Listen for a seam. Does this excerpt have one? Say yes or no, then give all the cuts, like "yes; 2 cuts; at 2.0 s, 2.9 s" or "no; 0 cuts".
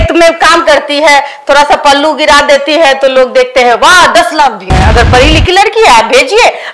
yes; 1 cut; at 4.7 s